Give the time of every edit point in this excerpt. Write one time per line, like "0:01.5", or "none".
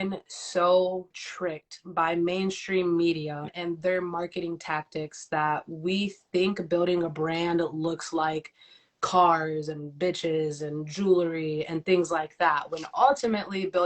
0:01.2